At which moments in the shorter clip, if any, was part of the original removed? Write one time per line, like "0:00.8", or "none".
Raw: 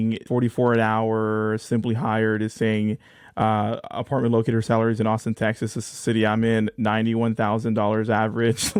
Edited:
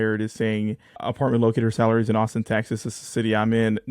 0:01.0